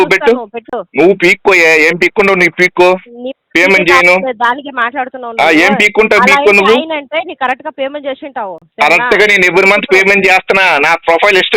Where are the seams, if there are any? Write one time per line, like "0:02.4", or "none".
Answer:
none